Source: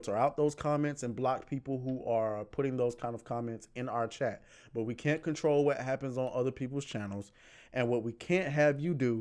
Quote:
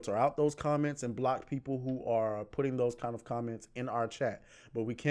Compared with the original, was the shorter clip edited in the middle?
no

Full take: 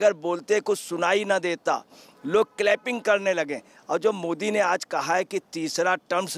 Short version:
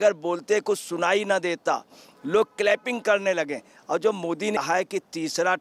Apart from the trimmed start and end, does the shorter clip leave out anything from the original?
yes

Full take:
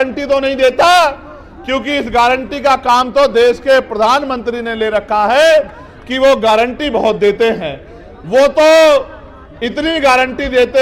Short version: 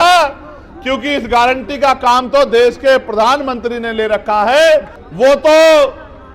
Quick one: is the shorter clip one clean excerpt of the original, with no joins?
no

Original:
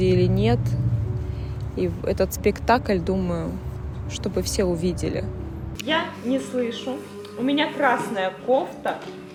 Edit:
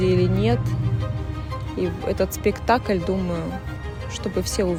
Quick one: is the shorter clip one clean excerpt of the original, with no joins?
yes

